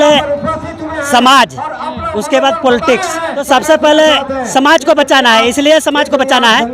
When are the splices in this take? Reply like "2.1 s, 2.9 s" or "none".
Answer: 3.4 s